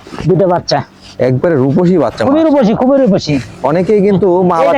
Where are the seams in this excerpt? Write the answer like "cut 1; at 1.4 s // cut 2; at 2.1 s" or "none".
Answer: none